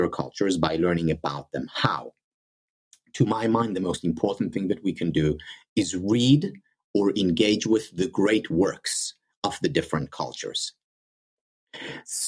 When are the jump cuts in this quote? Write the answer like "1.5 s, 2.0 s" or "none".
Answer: none